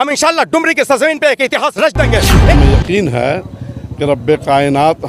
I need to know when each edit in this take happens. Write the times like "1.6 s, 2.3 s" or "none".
2.5 s

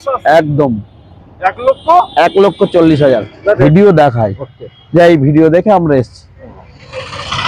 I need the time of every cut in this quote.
3.6 s

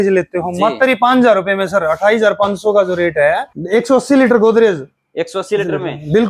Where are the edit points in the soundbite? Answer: 3.5 s

